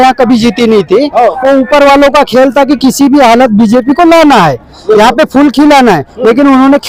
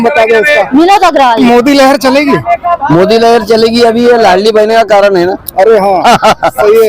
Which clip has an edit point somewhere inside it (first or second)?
second